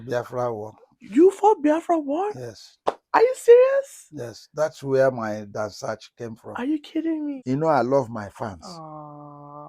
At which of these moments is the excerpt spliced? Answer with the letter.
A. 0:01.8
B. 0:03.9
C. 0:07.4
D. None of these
C